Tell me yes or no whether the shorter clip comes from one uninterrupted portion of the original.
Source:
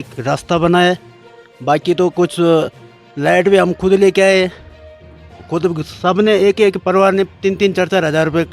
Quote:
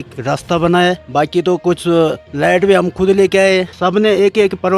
no